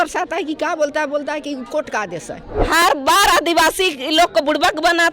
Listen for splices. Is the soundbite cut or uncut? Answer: cut